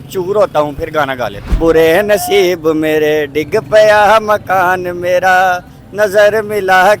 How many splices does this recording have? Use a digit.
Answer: 1